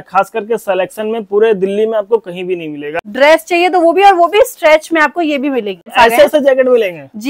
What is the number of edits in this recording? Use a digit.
2